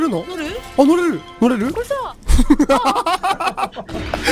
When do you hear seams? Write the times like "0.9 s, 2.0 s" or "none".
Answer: 1.3 s